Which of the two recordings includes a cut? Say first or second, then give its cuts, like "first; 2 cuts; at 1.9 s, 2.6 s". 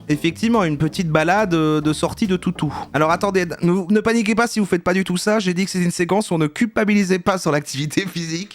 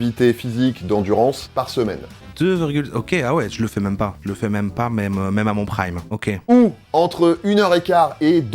second; 2 cuts; at 1.5 s, 6.3 s